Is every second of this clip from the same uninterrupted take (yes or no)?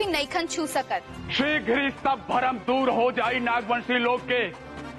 no